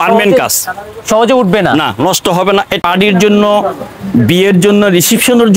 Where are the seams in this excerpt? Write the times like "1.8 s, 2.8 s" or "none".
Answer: 2.8 s